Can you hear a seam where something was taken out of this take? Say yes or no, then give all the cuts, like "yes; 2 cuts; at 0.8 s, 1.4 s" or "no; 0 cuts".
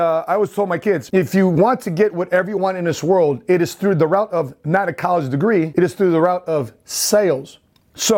yes; 2 cuts; at 1.0 s, 5.7 s